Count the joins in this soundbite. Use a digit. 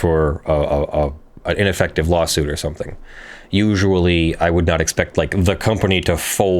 1